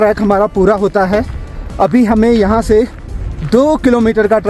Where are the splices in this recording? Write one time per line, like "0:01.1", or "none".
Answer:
none